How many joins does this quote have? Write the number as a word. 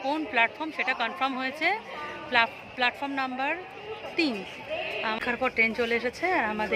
one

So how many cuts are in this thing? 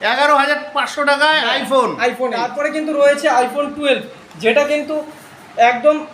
one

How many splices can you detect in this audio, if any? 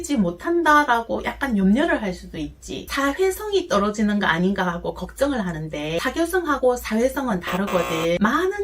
one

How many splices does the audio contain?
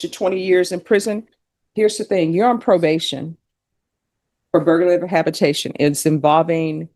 one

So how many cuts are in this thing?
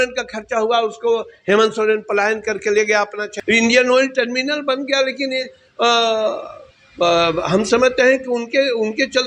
one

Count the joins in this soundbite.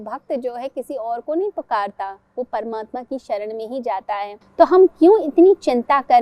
one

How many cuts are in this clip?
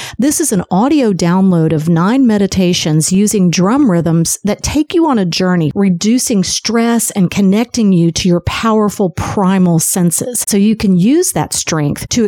two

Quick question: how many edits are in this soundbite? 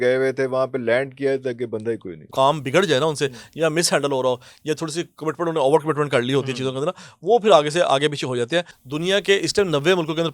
two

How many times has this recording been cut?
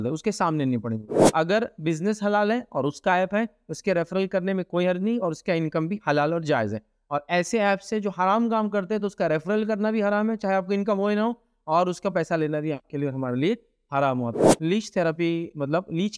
two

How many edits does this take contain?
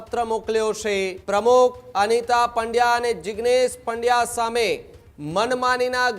one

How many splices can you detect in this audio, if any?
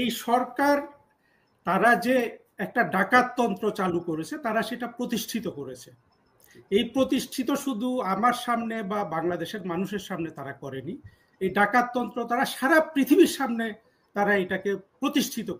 zero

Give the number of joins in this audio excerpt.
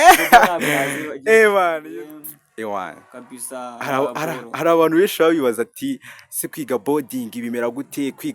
one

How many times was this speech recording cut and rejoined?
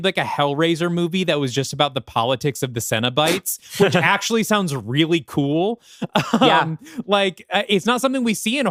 zero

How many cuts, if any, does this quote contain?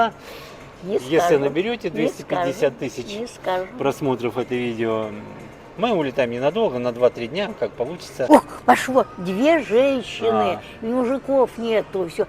one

